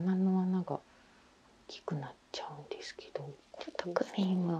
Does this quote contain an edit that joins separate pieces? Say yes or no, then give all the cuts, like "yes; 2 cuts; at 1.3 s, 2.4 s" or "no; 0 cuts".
yes; 1 cut; at 3.5 s